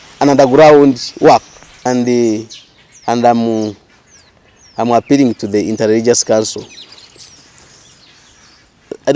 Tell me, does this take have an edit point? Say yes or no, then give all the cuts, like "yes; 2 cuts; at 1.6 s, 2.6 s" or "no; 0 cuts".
yes; 1 cut; at 1.6 s